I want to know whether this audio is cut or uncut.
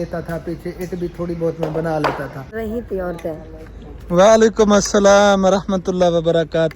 cut